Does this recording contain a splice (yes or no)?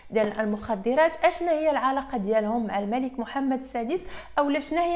no